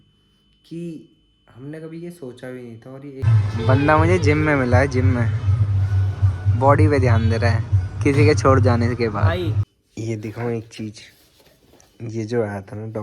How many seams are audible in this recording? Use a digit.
2